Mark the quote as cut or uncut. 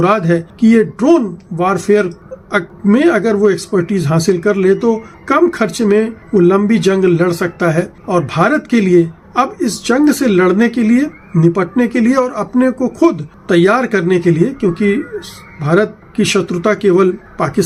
uncut